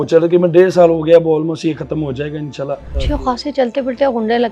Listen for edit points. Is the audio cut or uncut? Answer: cut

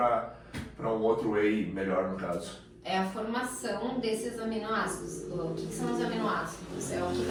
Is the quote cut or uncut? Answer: uncut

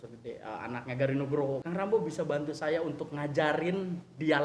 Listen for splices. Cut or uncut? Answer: cut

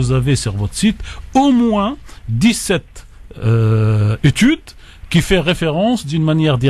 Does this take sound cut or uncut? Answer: uncut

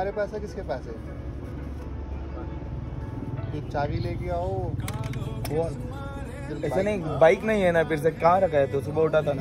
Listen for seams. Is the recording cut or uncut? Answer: uncut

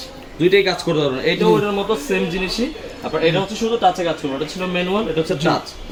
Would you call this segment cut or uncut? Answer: uncut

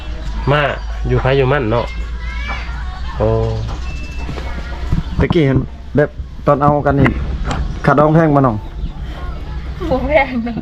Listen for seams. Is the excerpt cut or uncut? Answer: uncut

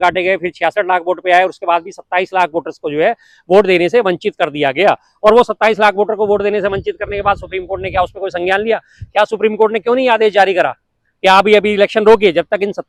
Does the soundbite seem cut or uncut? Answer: uncut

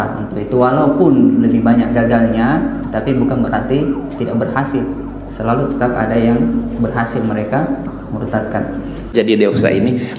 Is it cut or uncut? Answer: cut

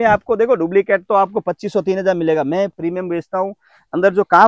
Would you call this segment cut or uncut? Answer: uncut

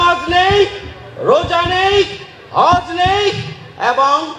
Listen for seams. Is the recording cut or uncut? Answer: uncut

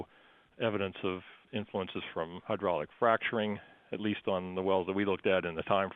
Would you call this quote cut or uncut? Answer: uncut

